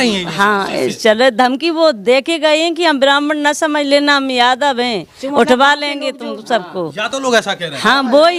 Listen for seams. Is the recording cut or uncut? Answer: uncut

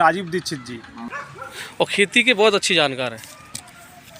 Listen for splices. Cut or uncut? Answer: cut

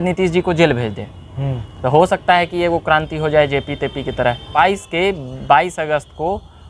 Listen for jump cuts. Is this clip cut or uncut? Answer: cut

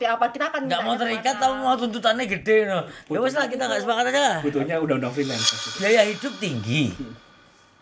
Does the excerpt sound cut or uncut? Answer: cut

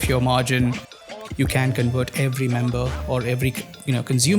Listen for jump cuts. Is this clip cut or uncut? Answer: cut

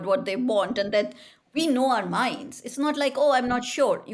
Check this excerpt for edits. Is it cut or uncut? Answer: uncut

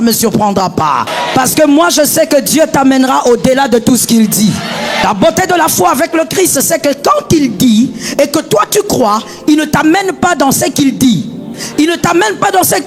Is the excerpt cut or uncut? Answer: cut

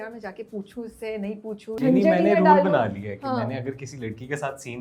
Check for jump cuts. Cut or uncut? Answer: cut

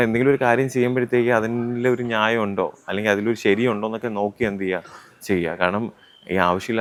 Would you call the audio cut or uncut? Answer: uncut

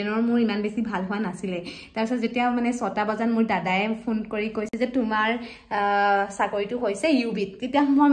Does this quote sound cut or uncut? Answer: uncut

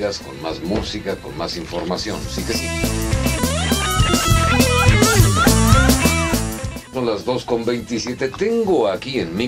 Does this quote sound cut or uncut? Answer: cut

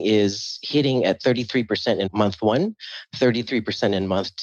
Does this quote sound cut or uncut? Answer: cut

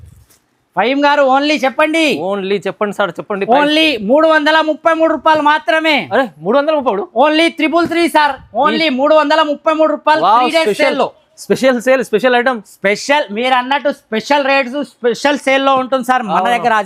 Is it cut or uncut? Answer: uncut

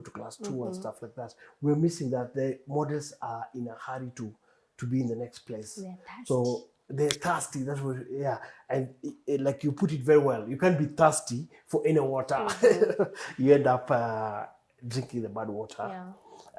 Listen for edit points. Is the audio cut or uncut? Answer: uncut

